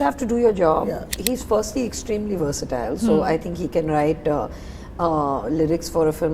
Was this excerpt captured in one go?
no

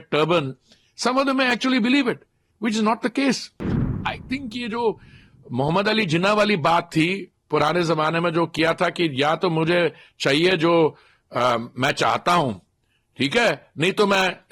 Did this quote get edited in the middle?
yes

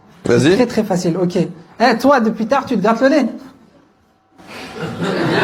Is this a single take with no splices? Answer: yes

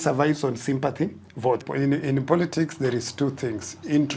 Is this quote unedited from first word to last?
no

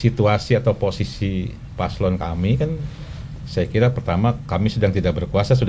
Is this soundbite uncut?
yes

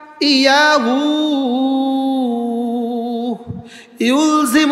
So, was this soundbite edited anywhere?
no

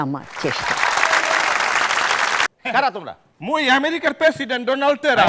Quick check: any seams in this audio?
yes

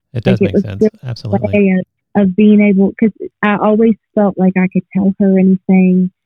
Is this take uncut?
no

